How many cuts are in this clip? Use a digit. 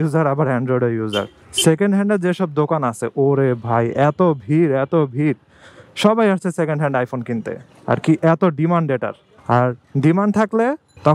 1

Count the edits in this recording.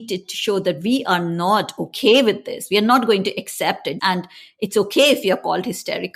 1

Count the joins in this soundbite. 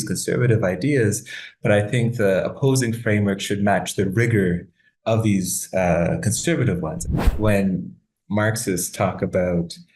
1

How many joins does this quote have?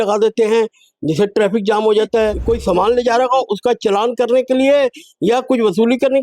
1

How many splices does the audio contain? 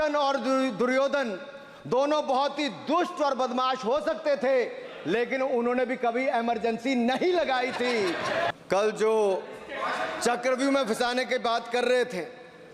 1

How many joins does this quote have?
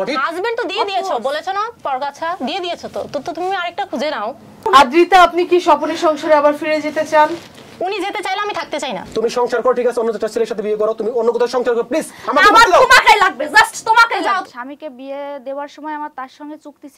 3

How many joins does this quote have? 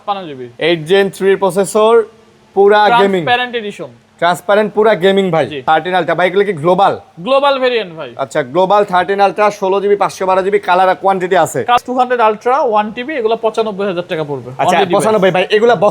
2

